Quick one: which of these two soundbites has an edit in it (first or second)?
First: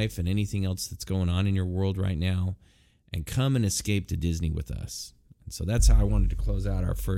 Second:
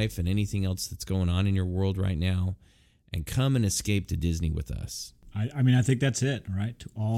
second